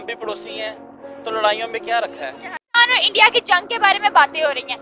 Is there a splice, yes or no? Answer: yes